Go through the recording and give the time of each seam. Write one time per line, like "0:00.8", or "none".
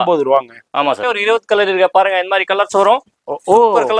0:01.0